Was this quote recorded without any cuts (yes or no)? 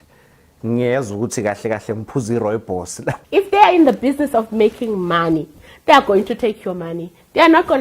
no